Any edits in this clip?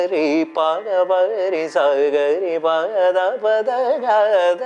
no; 0 cuts

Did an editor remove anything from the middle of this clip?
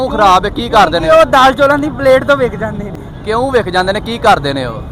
no; 0 cuts

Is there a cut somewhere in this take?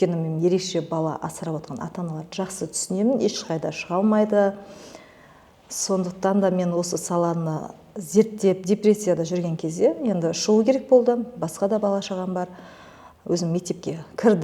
no; 0 cuts

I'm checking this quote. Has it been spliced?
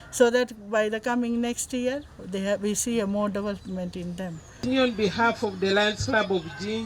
yes; 1 cut; at 4.6 s

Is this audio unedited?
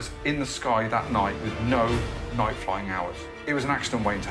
no; 2 cuts; at 1.5 s, 3.3 s

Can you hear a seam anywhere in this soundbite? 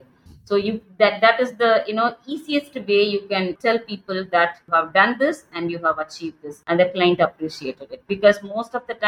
yes; 3 cuts; at 3.6 s, 4.6 s, 6.5 s

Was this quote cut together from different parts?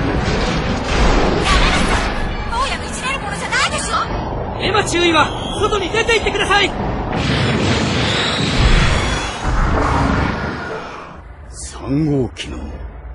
no; 0 cuts

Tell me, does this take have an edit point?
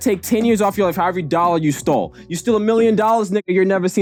no; 0 cuts

